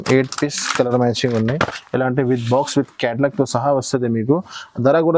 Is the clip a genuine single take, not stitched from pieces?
yes; 0 cuts

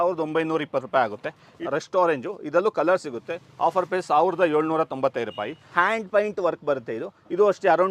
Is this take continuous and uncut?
no; 2 cuts; at 1.5 s, 5.6 s

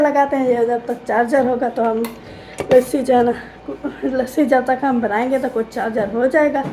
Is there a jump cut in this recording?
no; 0 cuts

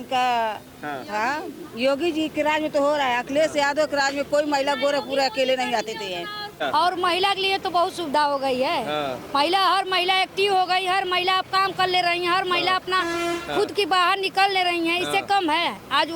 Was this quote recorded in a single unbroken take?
no; 1 cut; at 6.6 s

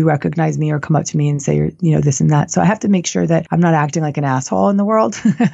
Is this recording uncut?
no; 1 cut; at 3.5 s

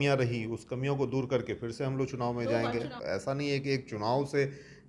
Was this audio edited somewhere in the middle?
yes; 1 cut; at 3.0 s

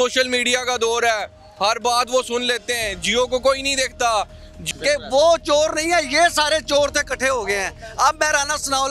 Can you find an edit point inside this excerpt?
yes; 1 cut; at 4.6 s

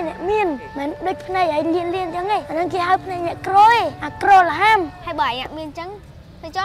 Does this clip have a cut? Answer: yes; 1 cut; at 5.0 s

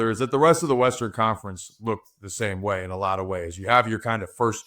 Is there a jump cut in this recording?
no; 0 cuts

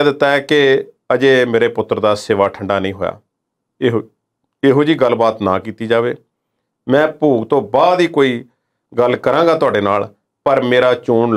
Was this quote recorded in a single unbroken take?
yes; 0 cuts

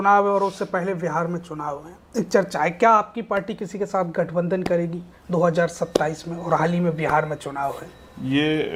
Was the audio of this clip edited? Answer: no; 0 cuts

